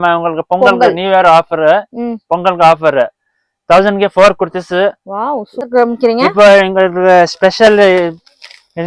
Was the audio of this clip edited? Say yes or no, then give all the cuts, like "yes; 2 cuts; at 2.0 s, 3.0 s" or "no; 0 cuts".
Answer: yes; 1 cut; at 5.5 s